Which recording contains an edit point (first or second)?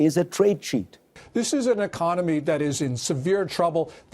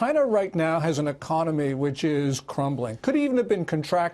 first